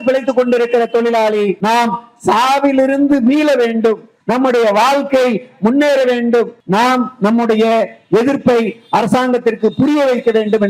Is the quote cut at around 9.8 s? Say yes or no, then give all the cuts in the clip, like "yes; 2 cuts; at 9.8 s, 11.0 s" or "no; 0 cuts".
no; 3 cuts; at 1.6 s, 4.1 s, 6.6 s